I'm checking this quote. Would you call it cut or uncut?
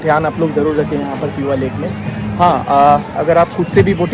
uncut